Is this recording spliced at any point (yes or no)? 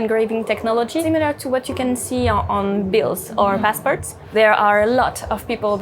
yes